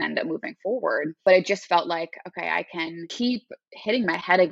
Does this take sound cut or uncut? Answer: cut